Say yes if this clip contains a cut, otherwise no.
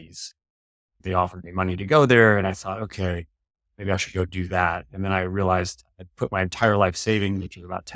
yes